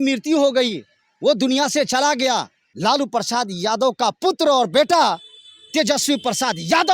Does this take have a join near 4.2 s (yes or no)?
no